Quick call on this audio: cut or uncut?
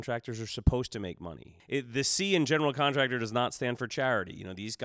cut